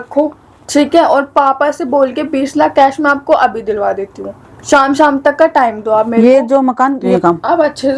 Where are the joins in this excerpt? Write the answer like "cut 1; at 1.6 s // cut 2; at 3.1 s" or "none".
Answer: cut 1; at 7.1 s